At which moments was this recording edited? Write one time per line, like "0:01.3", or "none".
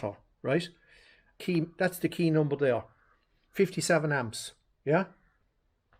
0:01.3